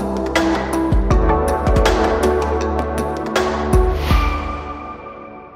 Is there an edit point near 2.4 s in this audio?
no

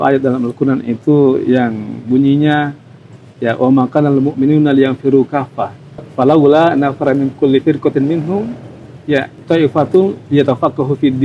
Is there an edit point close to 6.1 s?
yes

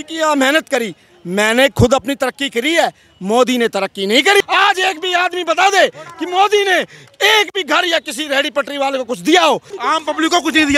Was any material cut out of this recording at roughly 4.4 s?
yes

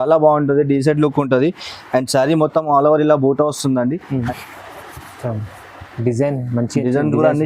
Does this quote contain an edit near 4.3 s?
yes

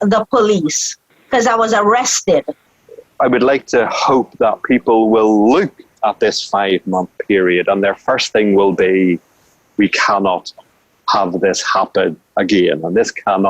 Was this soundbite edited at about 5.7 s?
no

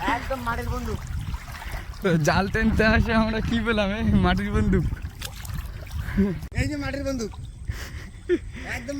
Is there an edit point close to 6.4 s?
yes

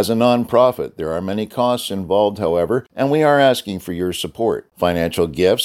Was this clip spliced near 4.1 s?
no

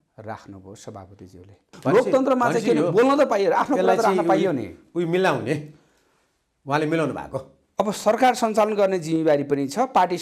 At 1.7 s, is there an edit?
yes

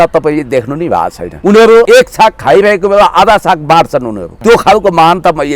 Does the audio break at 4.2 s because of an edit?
yes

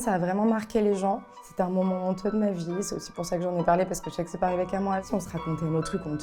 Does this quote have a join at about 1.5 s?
no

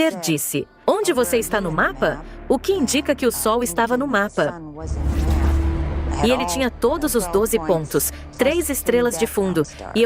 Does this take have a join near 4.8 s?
yes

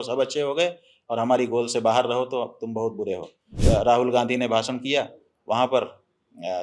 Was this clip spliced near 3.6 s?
yes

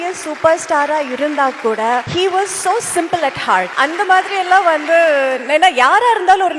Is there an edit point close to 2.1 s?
yes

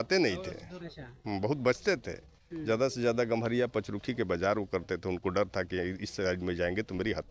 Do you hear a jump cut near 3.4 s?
no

